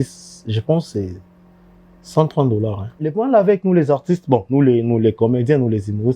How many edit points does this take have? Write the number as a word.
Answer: one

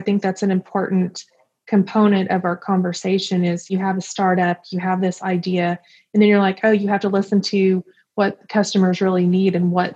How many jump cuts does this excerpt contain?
one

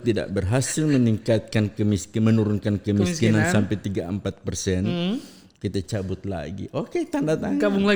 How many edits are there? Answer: zero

